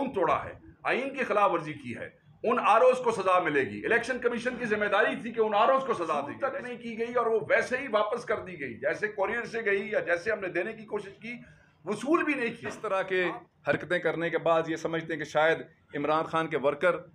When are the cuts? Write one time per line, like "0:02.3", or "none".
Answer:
0:06.3
0:12.7